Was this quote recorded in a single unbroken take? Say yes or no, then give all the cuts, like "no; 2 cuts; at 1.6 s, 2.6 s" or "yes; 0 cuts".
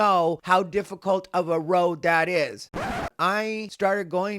no; 1 cut; at 2.7 s